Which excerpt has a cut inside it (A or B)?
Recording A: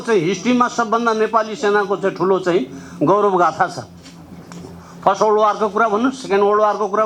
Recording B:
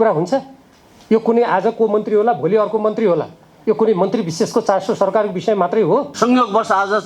B